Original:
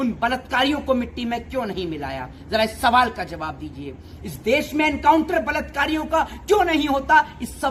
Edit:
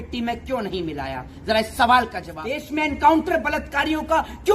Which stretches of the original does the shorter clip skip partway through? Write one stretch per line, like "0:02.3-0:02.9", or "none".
0:03.7-0:04.6